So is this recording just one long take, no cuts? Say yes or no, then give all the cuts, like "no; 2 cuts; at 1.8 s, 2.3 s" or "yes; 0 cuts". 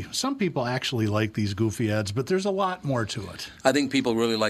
yes; 0 cuts